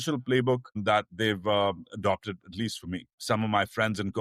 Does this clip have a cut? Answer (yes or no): yes